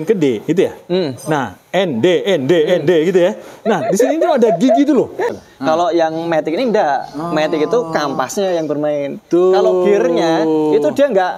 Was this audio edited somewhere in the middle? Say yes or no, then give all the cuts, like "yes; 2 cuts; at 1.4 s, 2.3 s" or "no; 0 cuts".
yes; 1 cut; at 5.4 s